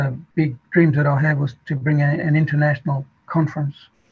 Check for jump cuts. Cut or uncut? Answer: uncut